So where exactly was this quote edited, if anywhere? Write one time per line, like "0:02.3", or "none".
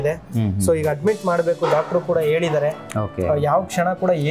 none